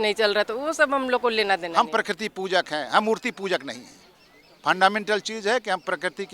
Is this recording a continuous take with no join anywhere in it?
no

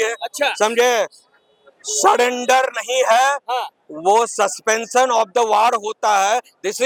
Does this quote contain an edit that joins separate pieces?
no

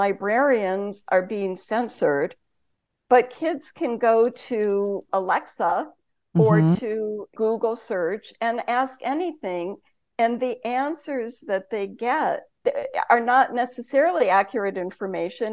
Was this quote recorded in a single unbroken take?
no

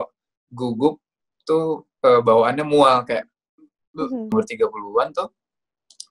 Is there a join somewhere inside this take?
yes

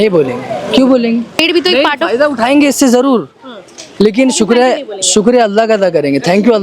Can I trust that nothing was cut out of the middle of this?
no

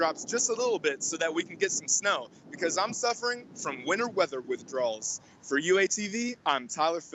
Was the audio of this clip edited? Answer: no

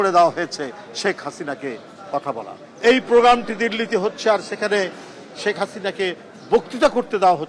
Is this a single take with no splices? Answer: no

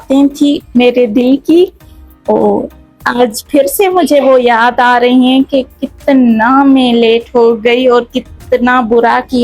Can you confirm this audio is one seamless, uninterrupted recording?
yes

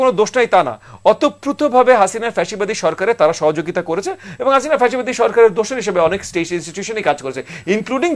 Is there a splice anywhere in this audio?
no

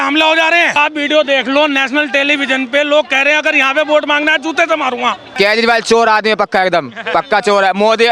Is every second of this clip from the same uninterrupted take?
no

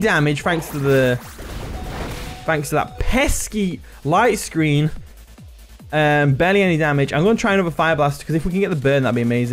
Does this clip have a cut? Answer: no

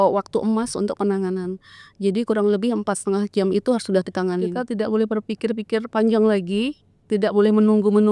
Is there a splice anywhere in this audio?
yes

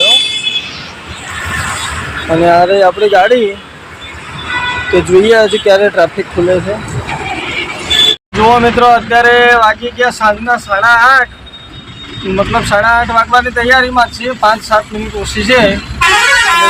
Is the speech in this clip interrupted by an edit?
no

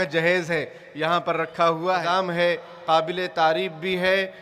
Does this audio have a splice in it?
yes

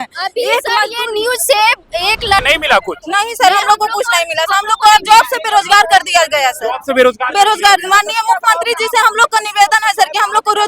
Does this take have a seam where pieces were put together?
yes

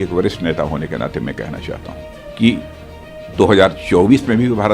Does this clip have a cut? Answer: yes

